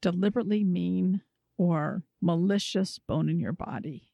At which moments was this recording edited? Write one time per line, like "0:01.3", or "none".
0:02.1